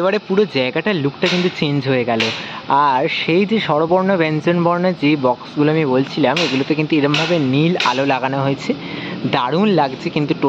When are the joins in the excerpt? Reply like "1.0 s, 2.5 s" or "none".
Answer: none